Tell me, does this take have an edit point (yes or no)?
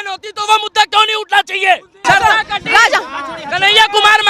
yes